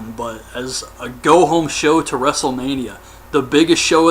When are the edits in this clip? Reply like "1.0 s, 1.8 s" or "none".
1.4 s